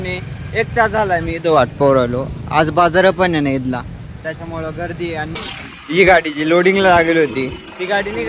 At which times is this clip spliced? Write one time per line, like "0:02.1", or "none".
0:05.3